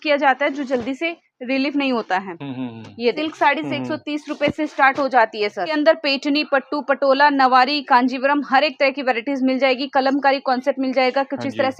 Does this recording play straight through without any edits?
no; 2 cuts; at 3.2 s, 5.7 s

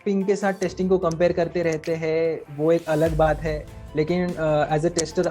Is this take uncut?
yes; 0 cuts

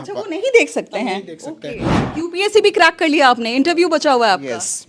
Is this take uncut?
no; 1 cut; at 2.0 s

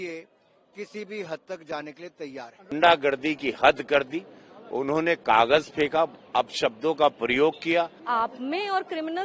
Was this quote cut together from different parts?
yes; 2 cuts; at 2.7 s, 8.0 s

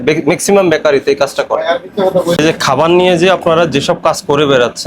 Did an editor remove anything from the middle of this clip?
yes; 1 cut; at 2.4 s

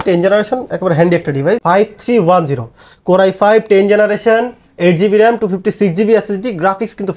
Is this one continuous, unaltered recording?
no; 1 cut; at 1.6 s

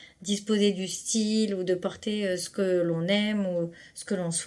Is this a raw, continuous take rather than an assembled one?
yes; 0 cuts

